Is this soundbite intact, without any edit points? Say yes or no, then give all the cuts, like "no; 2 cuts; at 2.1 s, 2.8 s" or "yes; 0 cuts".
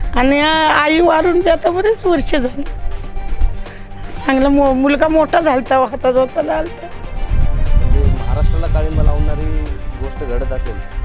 no; 1 cut; at 7.2 s